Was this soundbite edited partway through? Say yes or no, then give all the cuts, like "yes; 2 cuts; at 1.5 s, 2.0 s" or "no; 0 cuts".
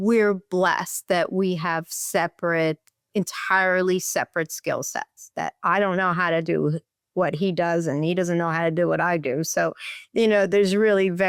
no; 0 cuts